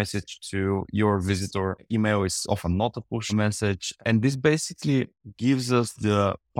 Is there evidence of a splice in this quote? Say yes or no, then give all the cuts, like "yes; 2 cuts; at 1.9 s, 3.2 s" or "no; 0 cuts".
yes; 1 cut; at 3.3 s